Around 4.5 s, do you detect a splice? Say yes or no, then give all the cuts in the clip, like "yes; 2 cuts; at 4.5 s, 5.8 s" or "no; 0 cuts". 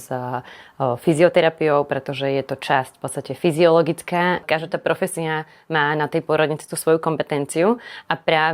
yes; 1 cut; at 4.5 s